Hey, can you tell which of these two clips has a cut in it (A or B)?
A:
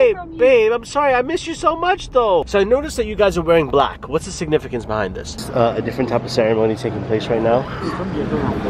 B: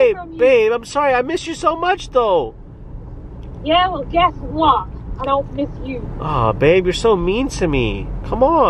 A